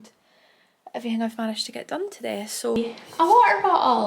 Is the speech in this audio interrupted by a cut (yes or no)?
yes